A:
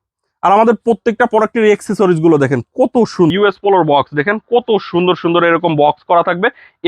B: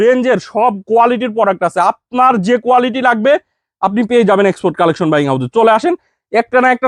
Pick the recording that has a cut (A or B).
A